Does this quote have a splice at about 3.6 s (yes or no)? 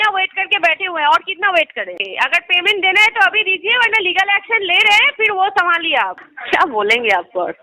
no